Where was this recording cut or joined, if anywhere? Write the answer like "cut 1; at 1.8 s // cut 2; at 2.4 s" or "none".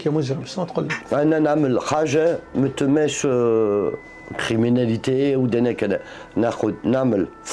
cut 1; at 1.0 s